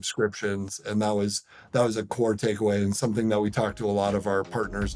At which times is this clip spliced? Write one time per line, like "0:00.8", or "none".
none